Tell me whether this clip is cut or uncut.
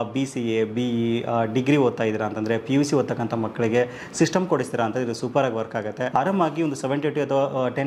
cut